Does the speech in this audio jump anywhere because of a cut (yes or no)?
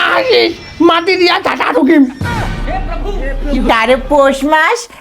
yes